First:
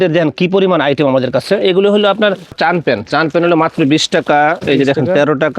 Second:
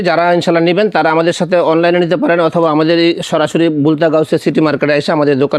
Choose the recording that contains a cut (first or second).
first